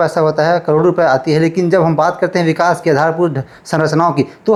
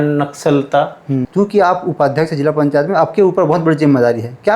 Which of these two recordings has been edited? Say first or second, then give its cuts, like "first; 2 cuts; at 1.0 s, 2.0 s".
second; 1 cut; at 1.3 s